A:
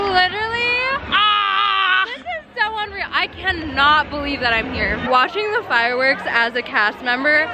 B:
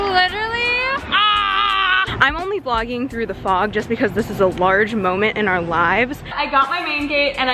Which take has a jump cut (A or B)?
B